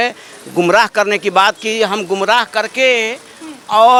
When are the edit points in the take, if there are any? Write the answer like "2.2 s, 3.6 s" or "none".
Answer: none